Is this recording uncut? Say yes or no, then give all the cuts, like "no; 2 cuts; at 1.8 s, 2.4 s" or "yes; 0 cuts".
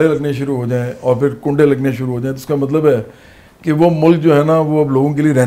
yes; 0 cuts